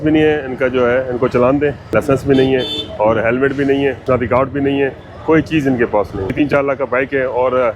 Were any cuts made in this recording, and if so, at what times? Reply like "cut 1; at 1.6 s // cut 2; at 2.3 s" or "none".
cut 1; at 1.8 s // cut 2; at 4.0 s // cut 3; at 6.3 s